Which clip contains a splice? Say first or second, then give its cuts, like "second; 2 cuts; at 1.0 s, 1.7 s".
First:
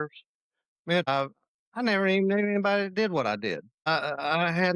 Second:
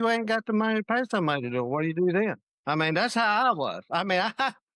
first; 2 cuts; at 1.1 s, 3.8 s